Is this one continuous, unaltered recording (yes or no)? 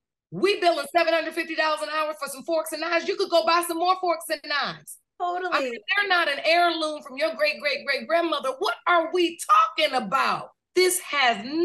no